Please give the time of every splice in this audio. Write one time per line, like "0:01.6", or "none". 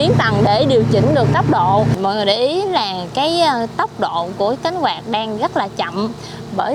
none